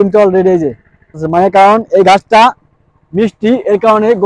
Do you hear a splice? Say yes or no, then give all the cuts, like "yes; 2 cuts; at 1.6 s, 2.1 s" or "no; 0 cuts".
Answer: yes; 1 cut; at 1.2 s